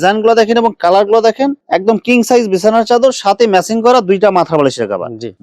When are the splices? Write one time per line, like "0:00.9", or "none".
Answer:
none